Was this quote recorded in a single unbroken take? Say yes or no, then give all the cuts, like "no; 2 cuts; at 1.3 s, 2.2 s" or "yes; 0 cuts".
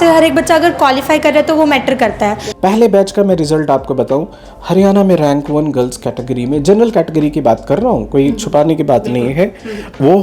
no; 1 cut; at 2.4 s